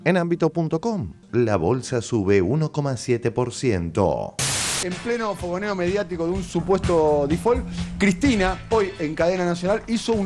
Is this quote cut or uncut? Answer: cut